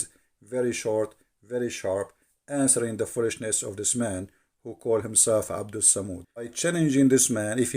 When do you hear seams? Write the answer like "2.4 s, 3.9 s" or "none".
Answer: 6.5 s